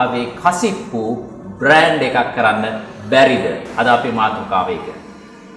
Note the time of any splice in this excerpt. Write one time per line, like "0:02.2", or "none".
none